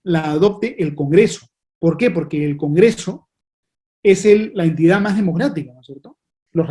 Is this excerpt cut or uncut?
uncut